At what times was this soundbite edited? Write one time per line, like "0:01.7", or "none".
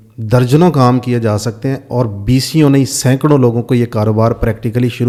none